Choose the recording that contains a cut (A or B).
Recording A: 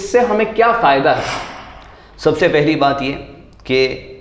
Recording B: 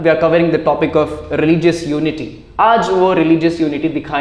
A